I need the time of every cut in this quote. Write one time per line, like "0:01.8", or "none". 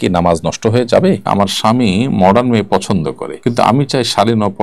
0:01.2
0:03.3